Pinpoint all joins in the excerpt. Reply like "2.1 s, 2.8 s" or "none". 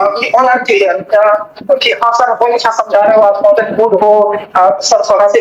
none